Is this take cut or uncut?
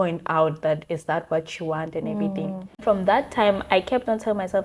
cut